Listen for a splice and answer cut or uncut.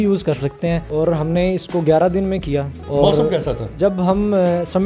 cut